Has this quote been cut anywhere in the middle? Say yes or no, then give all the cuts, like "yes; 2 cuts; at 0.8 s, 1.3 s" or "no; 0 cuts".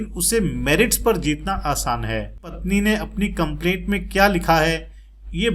yes; 1 cut; at 2.5 s